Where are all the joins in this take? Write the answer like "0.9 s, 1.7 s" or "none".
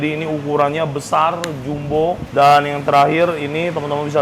2.2 s